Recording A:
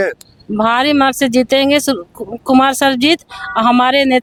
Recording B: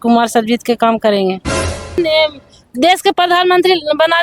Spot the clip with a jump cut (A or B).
B